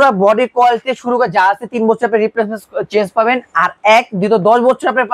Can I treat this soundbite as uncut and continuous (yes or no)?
yes